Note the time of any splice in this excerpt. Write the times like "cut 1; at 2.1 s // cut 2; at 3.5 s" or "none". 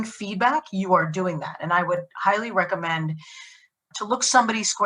cut 1; at 3.8 s